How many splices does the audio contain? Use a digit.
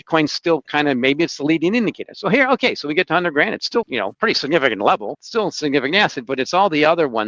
2